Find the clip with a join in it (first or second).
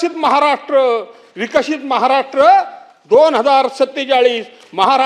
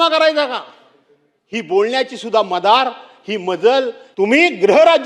second